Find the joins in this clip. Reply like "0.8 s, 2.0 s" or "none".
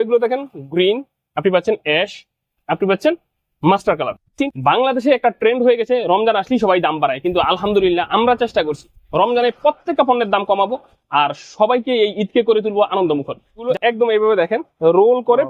4.3 s, 13.6 s